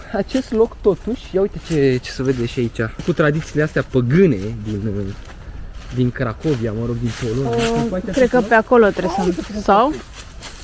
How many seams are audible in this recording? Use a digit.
1